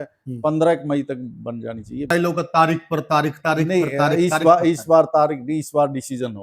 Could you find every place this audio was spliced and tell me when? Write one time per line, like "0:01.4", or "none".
0:02.1